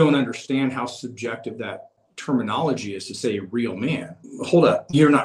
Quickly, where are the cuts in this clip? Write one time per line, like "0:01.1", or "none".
0:02.0
0:04.2